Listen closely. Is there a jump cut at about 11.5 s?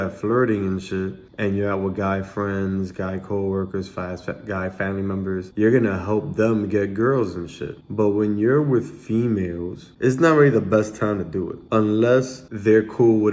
yes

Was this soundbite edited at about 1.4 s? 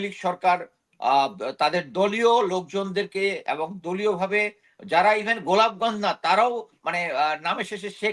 no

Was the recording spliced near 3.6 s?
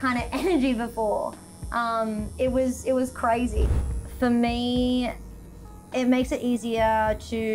yes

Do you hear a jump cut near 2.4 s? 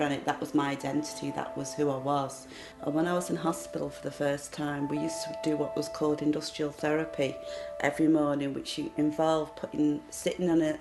no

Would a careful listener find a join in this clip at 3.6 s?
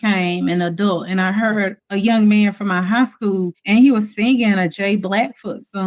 yes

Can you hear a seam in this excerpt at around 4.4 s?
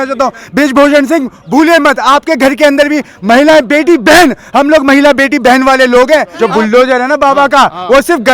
no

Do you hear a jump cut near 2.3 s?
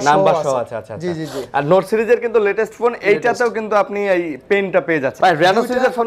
no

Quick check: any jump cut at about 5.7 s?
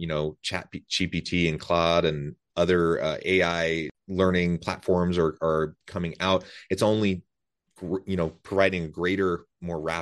no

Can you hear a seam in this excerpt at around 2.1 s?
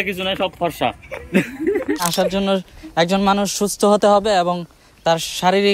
yes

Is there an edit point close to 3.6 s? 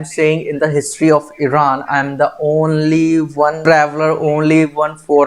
yes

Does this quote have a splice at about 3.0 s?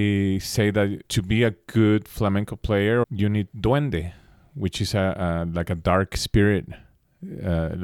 yes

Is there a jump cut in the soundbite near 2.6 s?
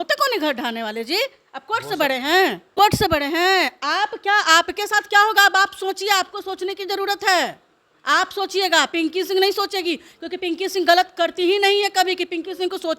yes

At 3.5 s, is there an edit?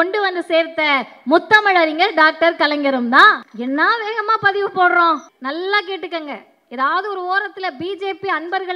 yes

